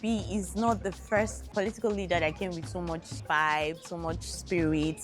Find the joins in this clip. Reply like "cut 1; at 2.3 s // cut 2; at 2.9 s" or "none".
cut 1; at 1.4 s // cut 2; at 3.1 s